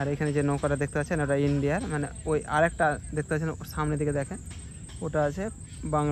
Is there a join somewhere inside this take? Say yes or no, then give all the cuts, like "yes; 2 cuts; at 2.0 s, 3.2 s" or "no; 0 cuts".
no; 0 cuts